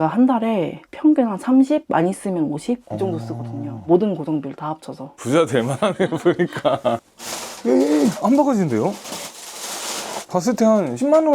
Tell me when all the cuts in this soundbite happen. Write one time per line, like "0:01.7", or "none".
0:07.0